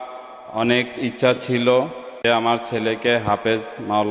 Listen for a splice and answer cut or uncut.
cut